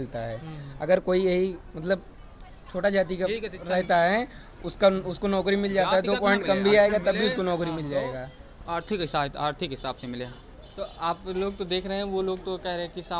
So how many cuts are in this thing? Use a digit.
0